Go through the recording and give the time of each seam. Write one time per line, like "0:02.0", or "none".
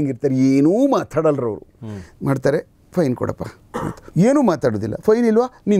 none